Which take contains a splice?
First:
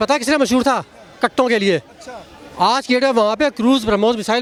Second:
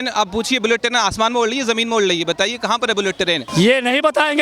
second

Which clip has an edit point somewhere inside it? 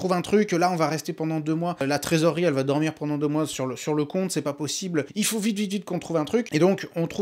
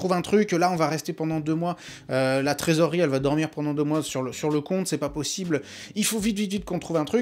first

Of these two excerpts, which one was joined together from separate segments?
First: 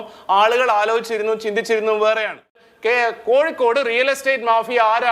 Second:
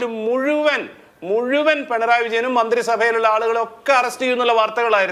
first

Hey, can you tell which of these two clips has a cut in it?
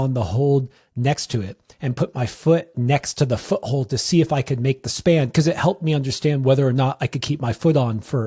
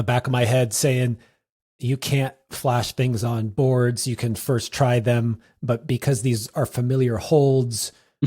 first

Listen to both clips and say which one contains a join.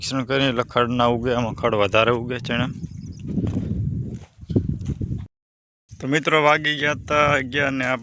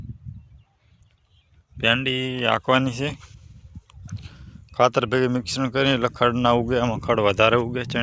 first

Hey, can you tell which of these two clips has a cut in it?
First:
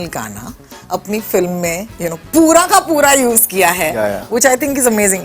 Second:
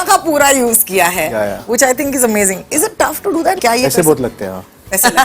second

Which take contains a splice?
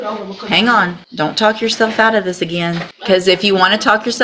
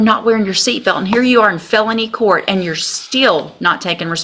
first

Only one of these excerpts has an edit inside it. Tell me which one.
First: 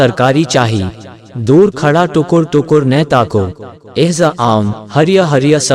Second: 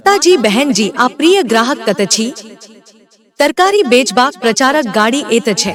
first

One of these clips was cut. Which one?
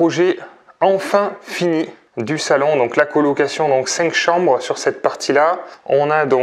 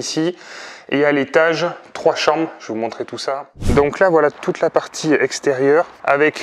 second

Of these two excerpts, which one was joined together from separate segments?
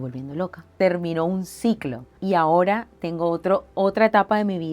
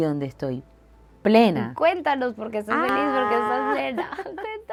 first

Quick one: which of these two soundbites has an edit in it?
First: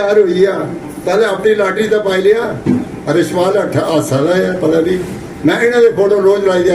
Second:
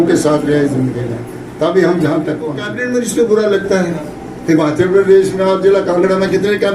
second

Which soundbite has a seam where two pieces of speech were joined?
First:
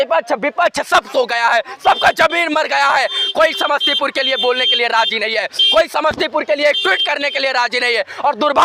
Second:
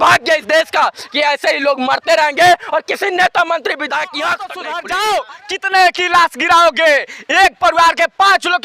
second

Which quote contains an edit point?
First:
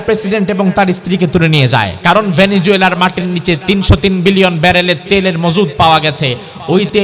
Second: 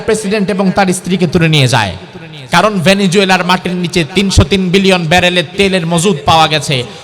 first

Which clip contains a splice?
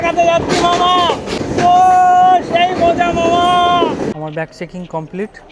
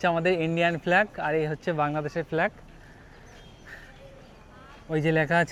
first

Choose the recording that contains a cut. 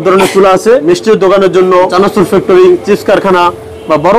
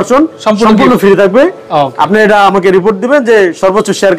first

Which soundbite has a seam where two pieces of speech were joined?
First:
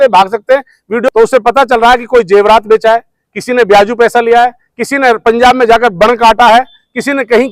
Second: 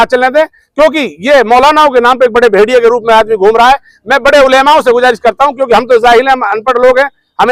first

